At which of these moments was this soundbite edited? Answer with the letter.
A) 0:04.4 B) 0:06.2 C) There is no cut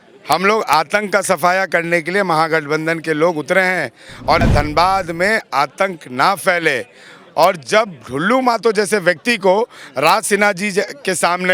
A